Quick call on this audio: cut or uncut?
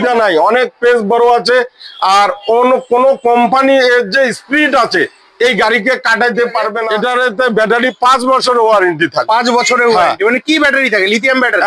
cut